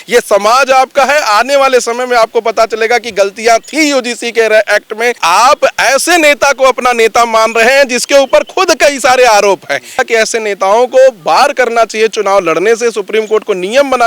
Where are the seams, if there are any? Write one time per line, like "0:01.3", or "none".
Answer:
0:05.2
0:10.0

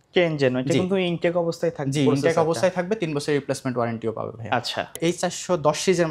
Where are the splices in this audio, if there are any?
0:04.9

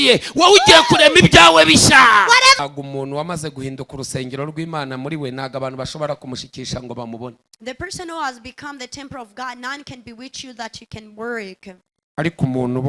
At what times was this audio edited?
0:02.6
0:11.9

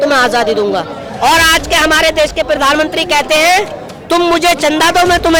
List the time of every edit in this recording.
none

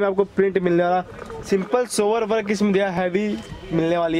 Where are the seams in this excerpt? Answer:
none

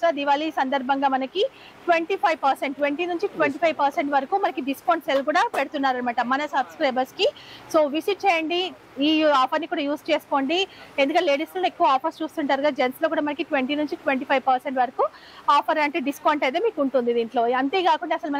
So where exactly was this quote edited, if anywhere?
none

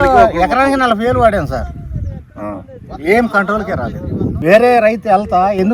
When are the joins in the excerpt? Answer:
0:04.4

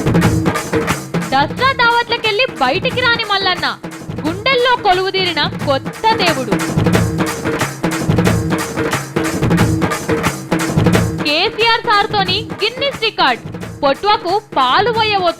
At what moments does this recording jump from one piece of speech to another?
none

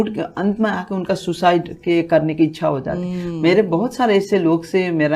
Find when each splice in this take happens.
none

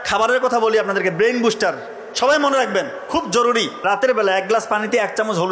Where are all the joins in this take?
0:03.8

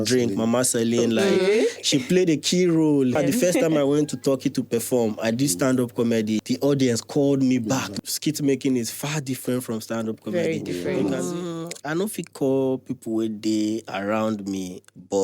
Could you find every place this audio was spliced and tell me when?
0:03.2
0:06.4
0:07.9
0:11.0

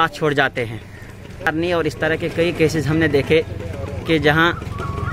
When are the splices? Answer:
0:01.5

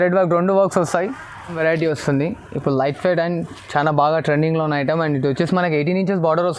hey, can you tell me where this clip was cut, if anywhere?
0:01.6

